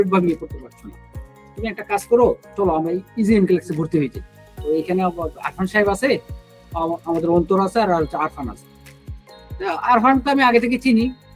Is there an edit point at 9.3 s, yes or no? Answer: no